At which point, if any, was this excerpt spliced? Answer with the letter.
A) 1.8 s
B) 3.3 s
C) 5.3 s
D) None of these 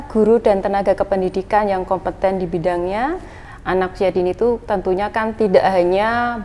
B